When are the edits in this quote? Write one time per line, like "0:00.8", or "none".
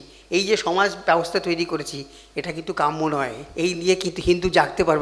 0:03.4

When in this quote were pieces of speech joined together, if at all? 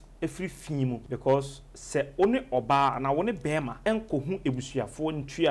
0:01.0
0:03.7

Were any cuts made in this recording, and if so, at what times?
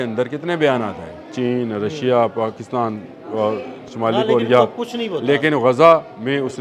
none

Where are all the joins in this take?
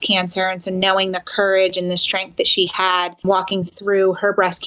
0:03.2

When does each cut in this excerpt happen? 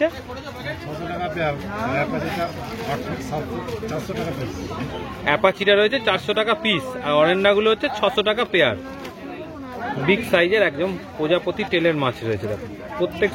none

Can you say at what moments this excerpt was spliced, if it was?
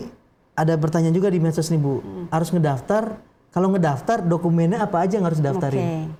none

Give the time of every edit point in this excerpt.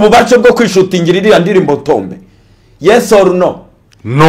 none

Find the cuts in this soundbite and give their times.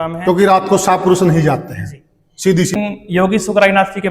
0:02.7

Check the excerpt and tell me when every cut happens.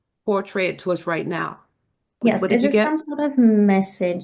0:02.2

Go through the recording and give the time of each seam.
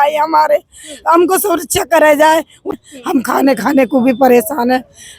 0:02.7

